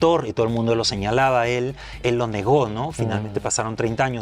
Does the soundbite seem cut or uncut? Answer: uncut